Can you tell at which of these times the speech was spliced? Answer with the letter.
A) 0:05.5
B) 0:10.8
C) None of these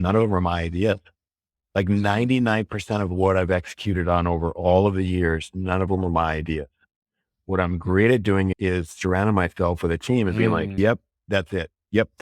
B